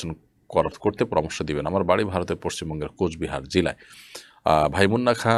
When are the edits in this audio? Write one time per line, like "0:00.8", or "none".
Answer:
none